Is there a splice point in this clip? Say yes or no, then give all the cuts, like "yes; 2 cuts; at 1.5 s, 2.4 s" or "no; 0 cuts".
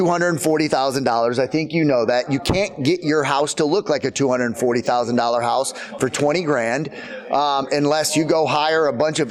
no; 0 cuts